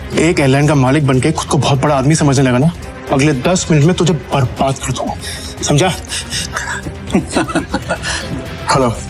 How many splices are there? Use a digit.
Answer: 2